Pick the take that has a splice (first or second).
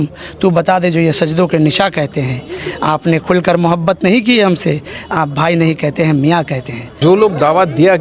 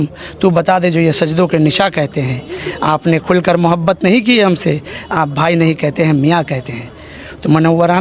first